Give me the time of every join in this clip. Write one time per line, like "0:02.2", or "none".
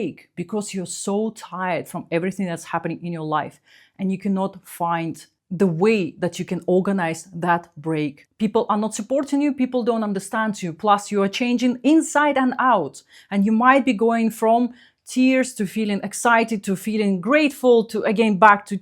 0:08.2